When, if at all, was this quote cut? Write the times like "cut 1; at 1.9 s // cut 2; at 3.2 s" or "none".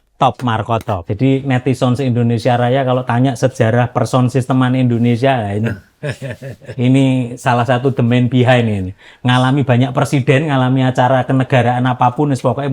cut 1; at 1.0 s